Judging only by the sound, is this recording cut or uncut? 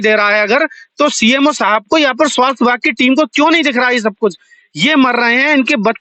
uncut